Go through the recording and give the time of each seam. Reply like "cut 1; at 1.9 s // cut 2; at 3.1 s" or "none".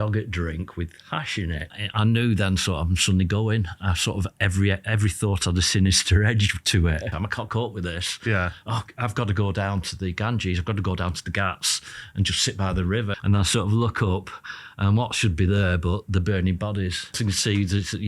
cut 1; at 1.7 s // cut 2; at 7.1 s // cut 3; at 13.1 s // cut 4; at 17.2 s